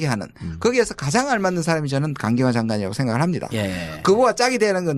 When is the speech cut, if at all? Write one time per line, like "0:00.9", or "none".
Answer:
0:03.4